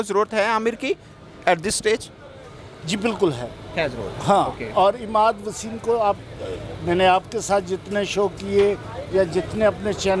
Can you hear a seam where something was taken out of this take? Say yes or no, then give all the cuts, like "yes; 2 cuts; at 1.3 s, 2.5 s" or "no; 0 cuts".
no; 0 cuts